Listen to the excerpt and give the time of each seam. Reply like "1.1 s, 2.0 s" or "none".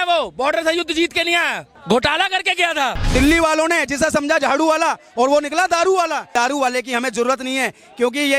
1.7 s, 3.0 s, 6.2 s

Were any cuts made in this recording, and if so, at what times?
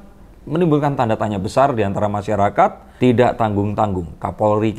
2.9 s

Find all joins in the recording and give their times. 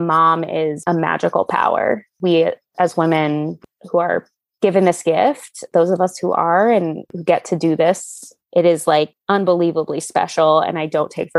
2.1 s, 3.6 s, 7.1 s, 8.3 s

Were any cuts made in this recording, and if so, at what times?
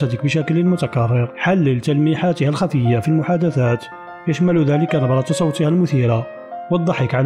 1.3 s

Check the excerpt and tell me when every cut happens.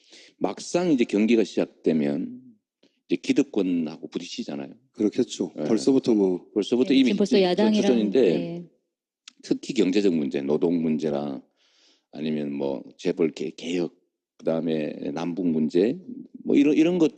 5.5 s

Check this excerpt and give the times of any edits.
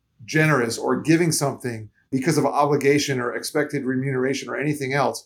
2.0 s

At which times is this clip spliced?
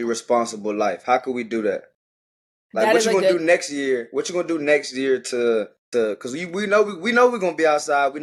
none

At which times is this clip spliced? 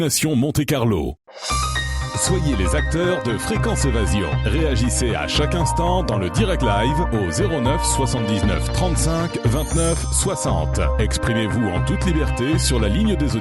1.2 s

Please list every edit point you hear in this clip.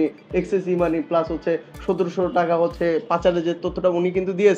none

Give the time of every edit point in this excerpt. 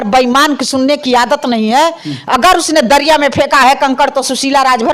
none

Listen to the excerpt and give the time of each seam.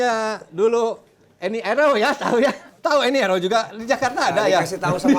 2.7 s

